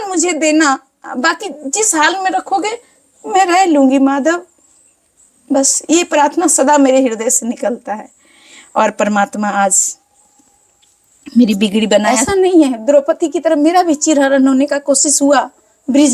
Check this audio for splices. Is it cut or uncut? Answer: cut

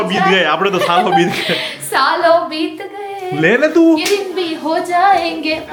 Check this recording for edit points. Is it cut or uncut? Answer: uncut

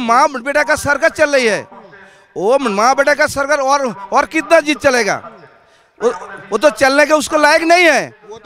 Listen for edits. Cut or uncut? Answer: uncut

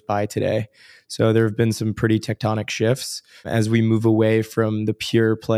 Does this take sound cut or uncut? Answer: cut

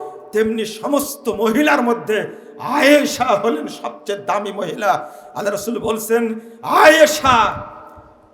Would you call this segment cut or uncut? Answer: uncut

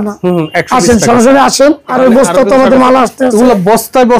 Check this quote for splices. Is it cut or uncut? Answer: cut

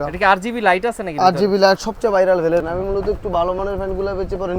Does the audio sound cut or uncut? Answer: cut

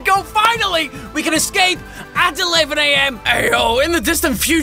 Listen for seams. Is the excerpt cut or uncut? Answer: cut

